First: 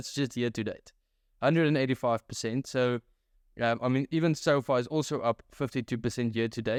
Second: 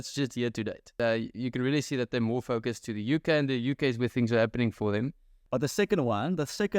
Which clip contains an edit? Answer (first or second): second